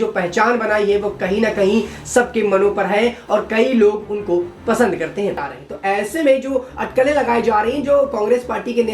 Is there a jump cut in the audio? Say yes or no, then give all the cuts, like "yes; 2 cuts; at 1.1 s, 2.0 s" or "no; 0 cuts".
yes; 1 cut; at 5.5 s